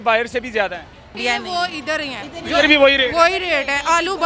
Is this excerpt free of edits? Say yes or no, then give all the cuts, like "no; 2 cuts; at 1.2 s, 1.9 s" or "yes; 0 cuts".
no; 1 cut; at 1.2 s